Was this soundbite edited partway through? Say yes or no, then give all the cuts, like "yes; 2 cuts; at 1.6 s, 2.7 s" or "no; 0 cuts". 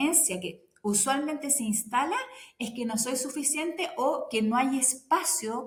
no; 0 cuts